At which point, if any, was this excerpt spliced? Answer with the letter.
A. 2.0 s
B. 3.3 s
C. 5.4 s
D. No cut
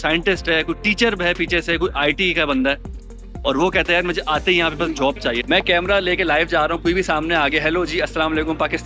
C